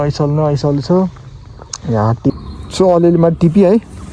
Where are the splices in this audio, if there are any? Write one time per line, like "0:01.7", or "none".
0:02.3